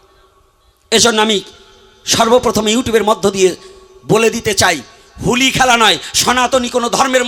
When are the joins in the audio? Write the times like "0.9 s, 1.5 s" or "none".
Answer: none